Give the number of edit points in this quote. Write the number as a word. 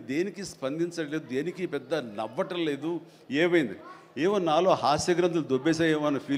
zero